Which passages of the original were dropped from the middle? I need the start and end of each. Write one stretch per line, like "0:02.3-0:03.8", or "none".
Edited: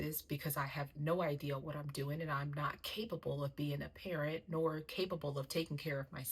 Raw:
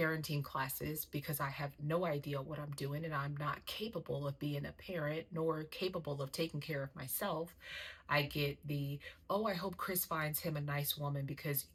none